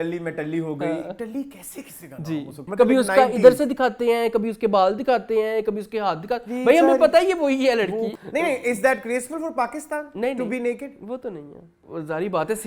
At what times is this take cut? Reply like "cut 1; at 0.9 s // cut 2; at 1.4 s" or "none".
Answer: cut 1; at 2.6 s // cut 2; at 8.2 s // cut 3; at 11.8 s